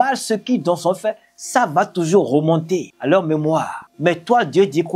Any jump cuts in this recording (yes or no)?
yes